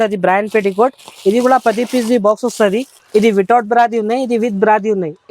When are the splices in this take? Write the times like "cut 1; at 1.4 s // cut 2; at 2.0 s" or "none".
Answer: cut 1; at 2.9 s